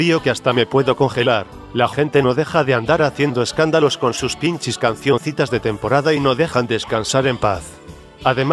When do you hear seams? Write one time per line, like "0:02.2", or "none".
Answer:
0:07.3